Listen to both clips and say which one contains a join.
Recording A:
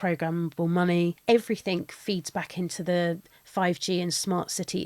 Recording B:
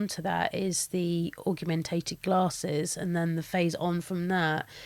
A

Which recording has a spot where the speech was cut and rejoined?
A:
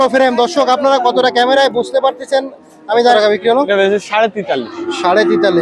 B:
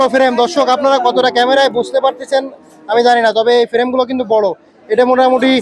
A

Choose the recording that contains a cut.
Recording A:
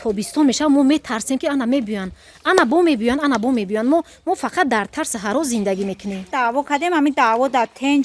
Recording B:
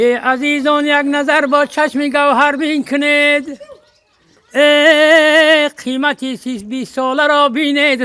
A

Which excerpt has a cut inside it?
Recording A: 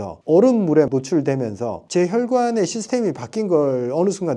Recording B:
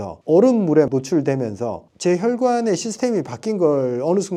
A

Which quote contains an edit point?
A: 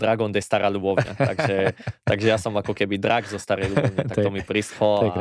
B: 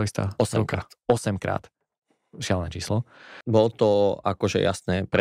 B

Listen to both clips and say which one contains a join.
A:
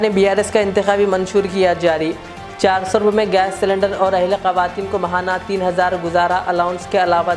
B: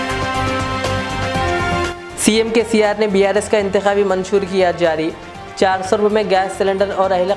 B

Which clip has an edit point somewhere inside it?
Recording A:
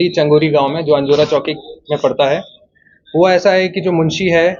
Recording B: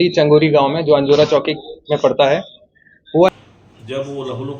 B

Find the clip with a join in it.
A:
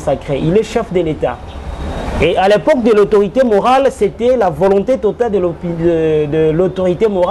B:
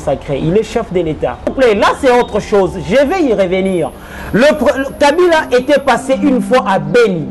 B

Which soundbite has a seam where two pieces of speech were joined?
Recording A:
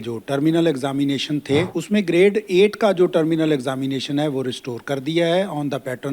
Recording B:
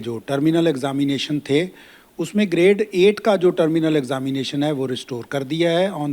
A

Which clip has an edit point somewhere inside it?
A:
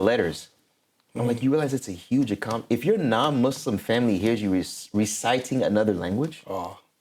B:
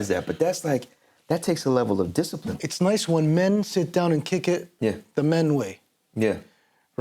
B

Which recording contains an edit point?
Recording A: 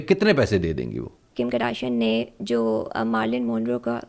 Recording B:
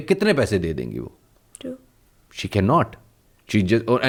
A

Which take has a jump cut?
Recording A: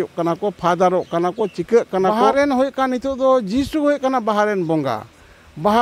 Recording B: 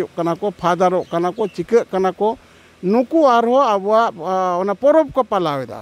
A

